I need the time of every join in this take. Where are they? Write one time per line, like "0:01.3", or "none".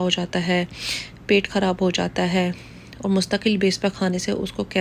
none